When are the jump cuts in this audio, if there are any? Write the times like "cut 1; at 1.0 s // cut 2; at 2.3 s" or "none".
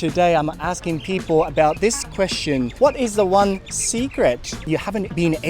cut 1; at 2.7 s // cut 2; at 4.8 s